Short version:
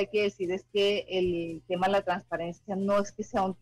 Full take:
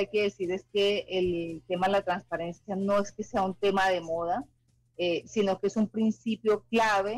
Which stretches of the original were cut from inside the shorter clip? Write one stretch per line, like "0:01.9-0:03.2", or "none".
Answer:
none